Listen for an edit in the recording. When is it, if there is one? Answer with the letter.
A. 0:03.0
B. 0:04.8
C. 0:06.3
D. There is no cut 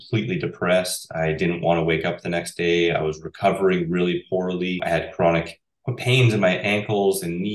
B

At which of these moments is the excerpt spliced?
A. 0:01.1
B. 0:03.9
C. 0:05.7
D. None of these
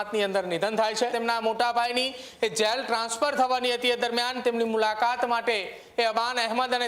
A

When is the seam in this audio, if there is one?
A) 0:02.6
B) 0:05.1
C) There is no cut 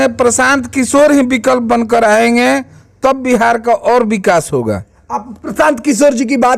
C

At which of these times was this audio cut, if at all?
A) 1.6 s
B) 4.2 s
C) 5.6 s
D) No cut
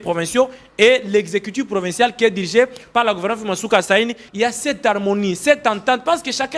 B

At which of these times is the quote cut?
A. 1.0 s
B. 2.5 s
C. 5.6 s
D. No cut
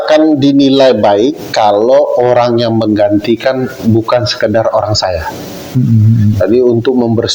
D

